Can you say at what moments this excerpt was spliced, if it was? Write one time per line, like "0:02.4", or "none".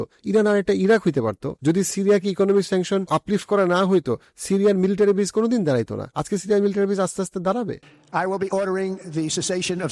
0:01.5
0:03.0
0:07.8